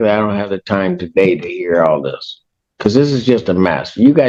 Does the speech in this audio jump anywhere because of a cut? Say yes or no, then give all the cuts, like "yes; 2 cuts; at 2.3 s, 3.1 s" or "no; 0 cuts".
no; 0 cuts